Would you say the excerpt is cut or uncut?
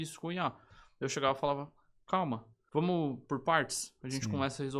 cut